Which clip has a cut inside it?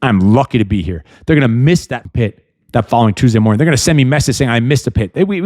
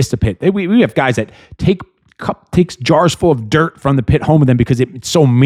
first; 1 cut; at 2.0 s

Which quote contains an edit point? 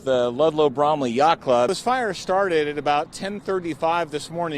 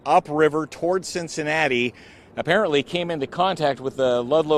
first; 1 cut; at 1.7 s

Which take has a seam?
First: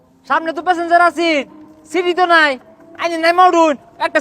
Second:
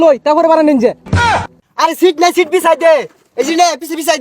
second; 1 cut; at 1.2 s

